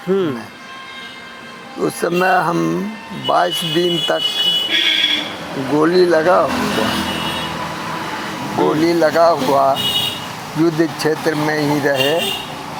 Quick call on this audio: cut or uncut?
uncut